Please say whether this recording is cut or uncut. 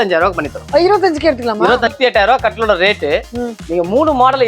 cut